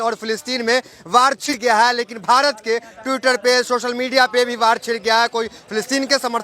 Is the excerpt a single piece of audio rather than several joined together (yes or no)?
no